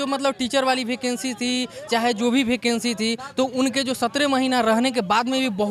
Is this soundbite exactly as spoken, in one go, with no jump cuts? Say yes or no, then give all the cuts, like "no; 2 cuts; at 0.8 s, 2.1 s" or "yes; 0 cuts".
yes; 0 cuts